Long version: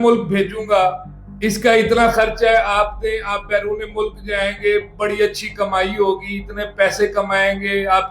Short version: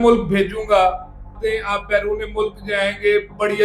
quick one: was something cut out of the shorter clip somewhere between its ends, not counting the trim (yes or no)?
yes